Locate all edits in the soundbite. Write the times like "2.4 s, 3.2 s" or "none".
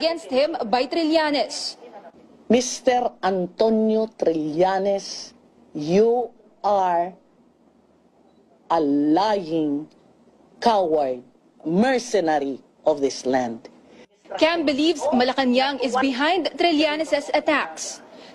15.1 s